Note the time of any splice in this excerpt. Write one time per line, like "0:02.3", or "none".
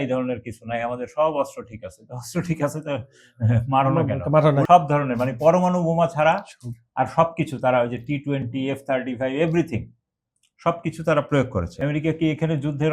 0:04.6
0:11.7